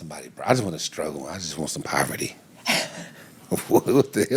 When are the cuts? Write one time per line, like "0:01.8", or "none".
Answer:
none